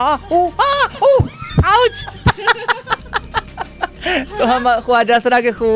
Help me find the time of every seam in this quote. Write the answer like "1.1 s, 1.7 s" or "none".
none